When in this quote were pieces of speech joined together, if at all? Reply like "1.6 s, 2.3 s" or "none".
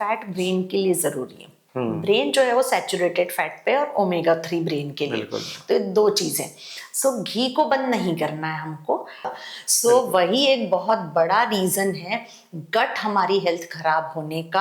9.4 s